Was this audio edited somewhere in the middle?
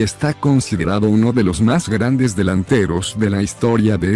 yes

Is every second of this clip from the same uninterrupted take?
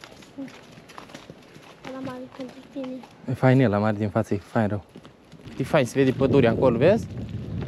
no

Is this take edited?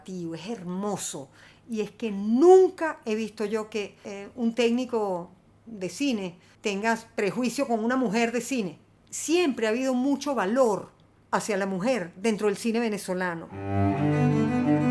yes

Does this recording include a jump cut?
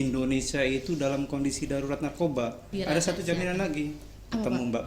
yes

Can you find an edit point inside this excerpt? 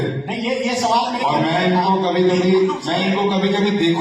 no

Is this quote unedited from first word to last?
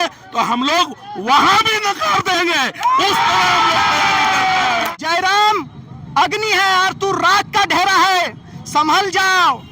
no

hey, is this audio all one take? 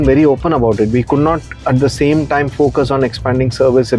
yes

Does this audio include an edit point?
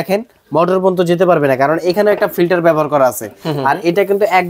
no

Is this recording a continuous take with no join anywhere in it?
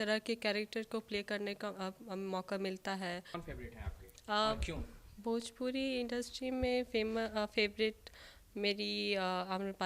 no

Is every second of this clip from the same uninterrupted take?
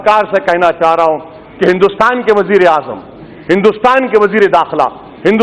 yes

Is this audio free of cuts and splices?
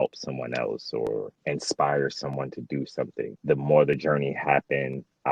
no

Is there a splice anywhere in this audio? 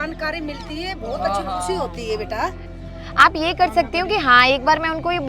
yes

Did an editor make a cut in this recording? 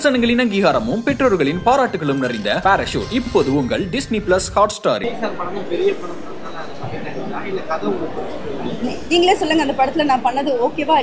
yes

